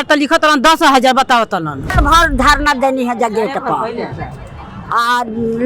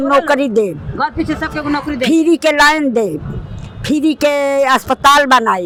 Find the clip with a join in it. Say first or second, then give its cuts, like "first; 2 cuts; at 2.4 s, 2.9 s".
first; 1 cut; at 2.0 s